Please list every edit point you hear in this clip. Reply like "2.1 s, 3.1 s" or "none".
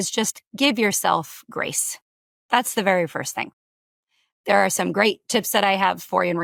none